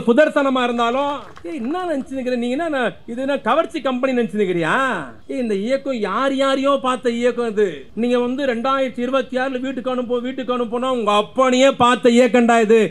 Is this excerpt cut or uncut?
cut